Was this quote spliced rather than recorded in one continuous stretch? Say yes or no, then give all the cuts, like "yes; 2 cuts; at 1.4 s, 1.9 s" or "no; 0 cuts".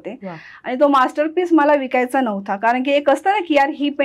no; 0 cuts